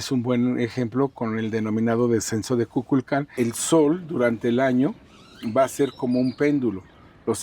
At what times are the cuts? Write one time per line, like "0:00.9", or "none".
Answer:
0:03.3